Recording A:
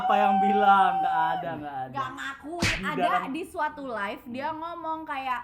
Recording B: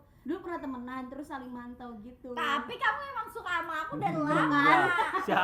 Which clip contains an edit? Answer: A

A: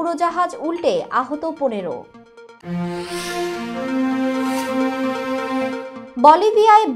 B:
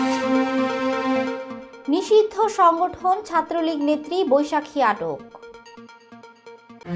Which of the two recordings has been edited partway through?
B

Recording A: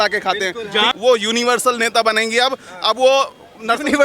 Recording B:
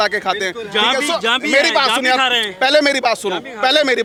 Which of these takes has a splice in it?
A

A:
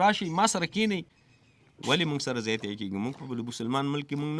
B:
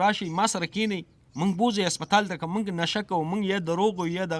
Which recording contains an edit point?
A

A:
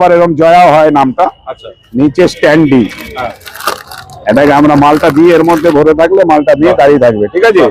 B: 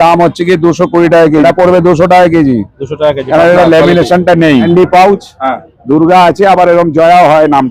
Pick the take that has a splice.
B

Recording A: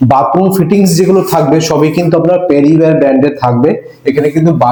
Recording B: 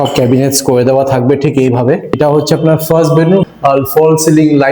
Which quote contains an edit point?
B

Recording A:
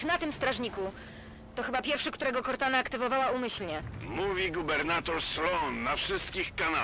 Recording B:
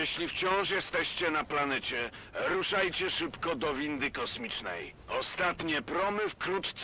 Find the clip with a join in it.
A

